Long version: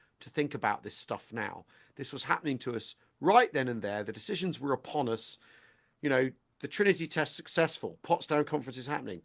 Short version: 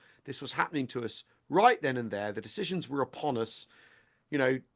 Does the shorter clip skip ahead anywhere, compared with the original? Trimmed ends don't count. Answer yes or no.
no